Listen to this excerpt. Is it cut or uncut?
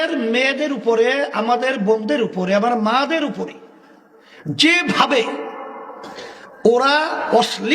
uncut